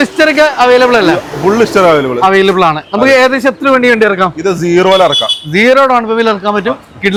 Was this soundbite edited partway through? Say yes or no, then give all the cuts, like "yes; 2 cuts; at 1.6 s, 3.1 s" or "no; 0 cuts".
no; 0 cuts